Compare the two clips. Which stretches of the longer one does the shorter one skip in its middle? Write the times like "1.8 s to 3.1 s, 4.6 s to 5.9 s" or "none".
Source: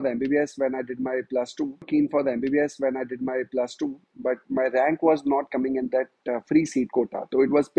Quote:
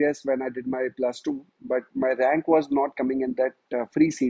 1.7 s to 3.9 s

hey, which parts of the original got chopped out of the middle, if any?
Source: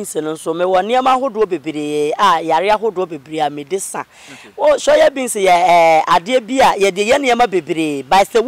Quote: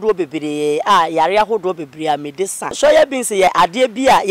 4.1 s to 4.8 s, 5.5 s to 6.0 s

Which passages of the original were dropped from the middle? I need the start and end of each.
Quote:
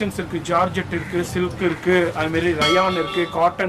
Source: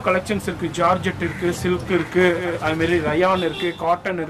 2.4 s to 2.6 s

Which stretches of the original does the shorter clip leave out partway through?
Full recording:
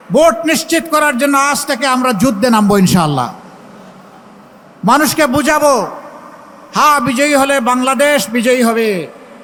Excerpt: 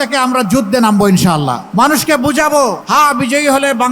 3.3 s to 4.7 s, 5.9 s to 6.7 s

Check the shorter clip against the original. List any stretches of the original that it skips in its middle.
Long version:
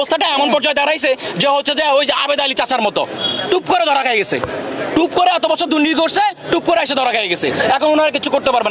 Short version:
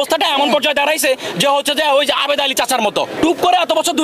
3.1 s to 4.9 s

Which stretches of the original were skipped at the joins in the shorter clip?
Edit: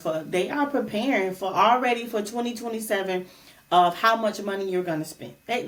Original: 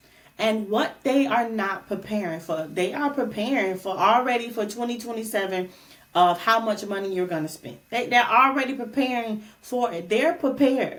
none

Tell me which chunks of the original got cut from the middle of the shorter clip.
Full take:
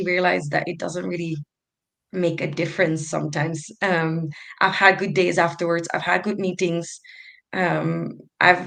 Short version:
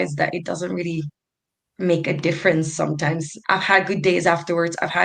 3.7 s to 4.4 s

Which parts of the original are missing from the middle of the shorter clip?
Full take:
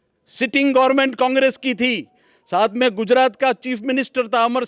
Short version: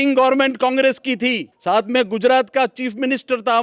2.1 s to 2.3 s

